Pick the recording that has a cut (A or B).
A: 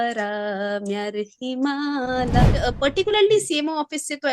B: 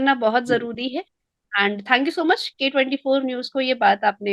A